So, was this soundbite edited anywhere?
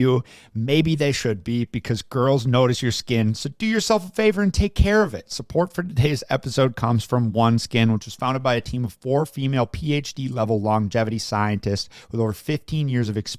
no; 0 cuts

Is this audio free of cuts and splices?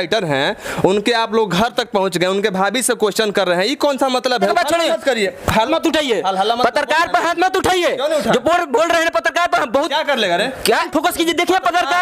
no; 3 cuts; at 4.5 s, 5.7 s, 10.9 s

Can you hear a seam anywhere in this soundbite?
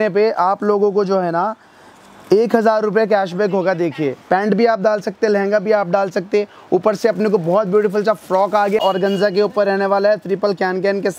yes; 2 cuts; at 4.2 s, 8.8 s

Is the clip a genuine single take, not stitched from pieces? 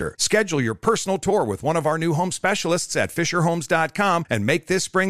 yes; 0 cuts

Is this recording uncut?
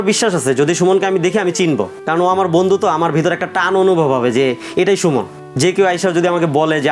yes; 0 cuts

